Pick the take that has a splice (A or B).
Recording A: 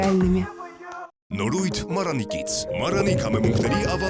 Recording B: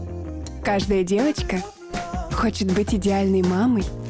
A